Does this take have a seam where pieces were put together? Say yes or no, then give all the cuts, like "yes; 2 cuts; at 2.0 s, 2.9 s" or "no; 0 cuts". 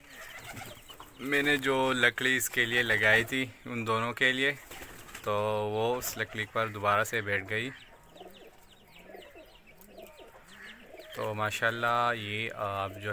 no; 0 cuts